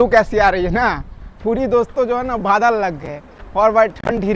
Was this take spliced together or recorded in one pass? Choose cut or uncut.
uncut